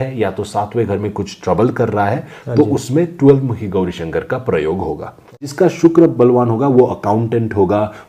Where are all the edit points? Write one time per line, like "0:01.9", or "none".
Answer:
0:05.5